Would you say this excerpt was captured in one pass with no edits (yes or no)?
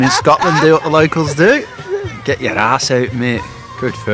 yes